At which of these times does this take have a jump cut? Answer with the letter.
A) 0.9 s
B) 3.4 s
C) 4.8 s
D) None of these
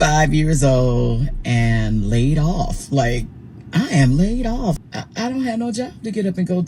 C